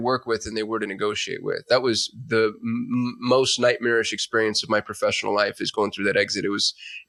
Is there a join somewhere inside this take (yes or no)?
no